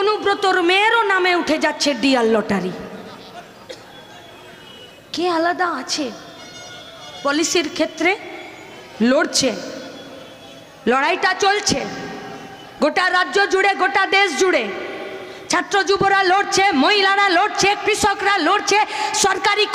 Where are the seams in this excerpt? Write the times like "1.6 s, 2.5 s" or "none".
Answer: none